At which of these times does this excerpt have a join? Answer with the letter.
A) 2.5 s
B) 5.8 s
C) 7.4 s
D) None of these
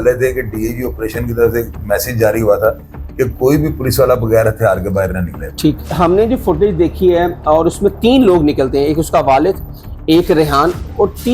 B